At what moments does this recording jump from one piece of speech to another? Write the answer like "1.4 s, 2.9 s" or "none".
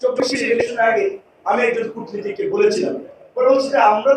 none